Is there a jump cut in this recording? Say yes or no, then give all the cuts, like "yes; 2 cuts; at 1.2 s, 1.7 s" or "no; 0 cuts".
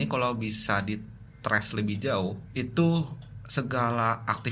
yes; 1 cut; at 2.4 s